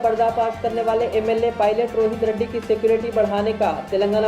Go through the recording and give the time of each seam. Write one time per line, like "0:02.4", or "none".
none